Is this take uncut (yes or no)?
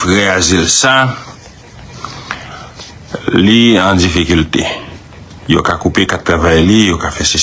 yes